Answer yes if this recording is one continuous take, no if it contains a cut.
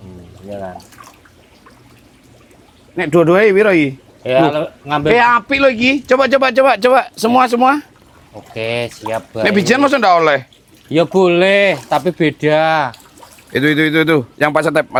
yes